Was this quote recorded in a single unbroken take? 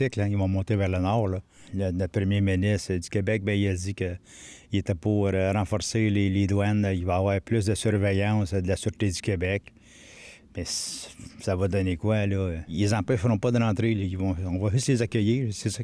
yes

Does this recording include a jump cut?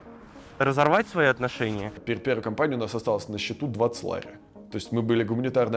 yes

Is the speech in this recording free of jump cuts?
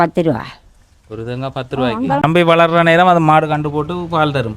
no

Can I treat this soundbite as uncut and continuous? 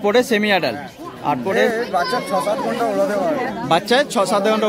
no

